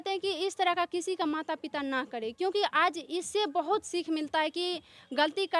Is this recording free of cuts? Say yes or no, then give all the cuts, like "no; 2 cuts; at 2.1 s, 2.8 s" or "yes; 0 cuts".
yes; 0 cuts